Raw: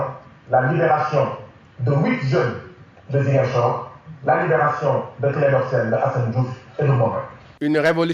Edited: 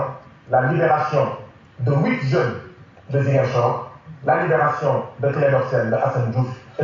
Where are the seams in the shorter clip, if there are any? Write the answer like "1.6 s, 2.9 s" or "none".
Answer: none